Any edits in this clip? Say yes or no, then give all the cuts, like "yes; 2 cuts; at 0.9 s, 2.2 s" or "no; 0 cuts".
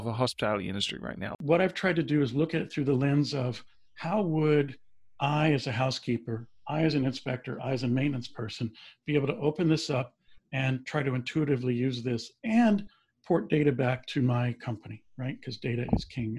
yes; 1 cut; at 1.4 s